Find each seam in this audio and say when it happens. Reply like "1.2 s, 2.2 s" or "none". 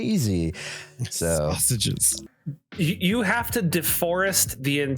2.2 s